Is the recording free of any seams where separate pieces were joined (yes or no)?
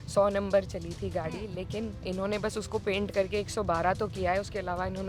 yes